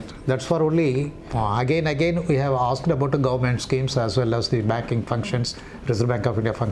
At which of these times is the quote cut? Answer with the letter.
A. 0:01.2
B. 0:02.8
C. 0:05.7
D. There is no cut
A